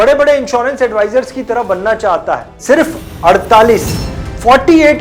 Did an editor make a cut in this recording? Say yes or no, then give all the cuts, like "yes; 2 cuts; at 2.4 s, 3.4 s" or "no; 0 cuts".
yes; 1 cut; at 2.5 s